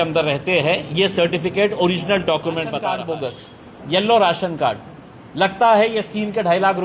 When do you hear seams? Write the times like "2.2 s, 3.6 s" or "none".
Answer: 3.0 s